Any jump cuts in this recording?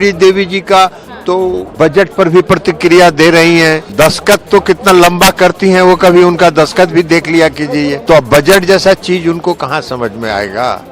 yes; 3 cuts; at 1.7 s, 3.9 s, 8.0 s

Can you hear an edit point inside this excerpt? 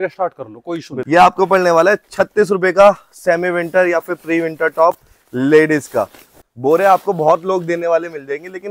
yes; 2 cuts; at 0.9 s, 6.2 s

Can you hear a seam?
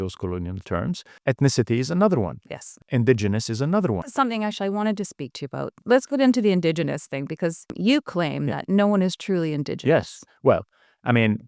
yes; 5 cuts; at 1.1 s, 2.8 s, 4.1 s, 5.8 s, 7.7 s

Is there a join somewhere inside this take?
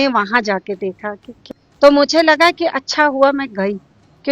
yes; 1 cut; at 1.4 s

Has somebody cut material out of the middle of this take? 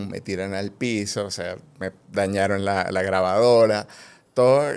no; 0 cuts

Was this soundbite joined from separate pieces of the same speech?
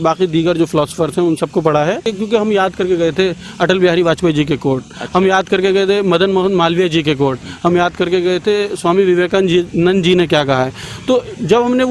yes; 1 cut; at 2.1 s

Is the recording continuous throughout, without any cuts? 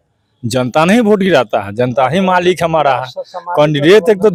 yes; 0 cuts

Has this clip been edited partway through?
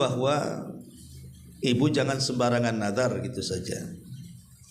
no; 0 cuts

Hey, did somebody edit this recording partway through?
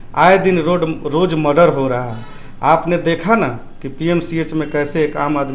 no; 0 cuts

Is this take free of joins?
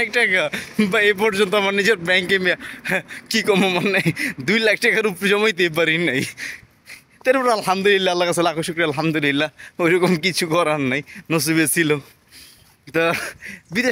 yes; 0 cuts

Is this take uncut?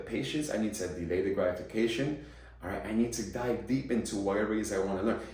yes; 0 cuts

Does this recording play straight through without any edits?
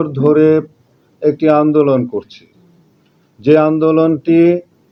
yes; 0 cuts

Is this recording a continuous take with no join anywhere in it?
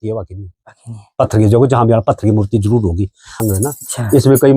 no; 1 cut; at 3.2 s

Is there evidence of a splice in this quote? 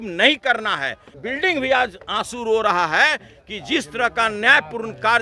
yes; 1 cut; at 1.2 s

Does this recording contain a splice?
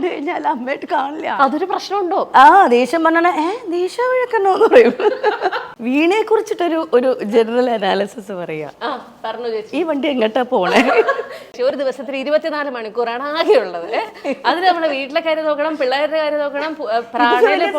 yes; 3 cuts; at 1.3 s, 5.5 s, 11.6 s

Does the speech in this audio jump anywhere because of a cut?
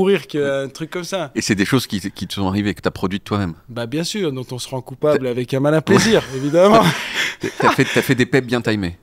no; 0 cuts

